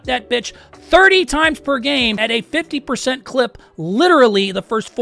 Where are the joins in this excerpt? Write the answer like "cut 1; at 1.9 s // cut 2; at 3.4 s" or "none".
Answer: cut 1; at 2.2 s